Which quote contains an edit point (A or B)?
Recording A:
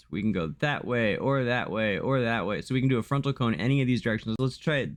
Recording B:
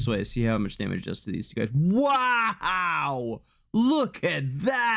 B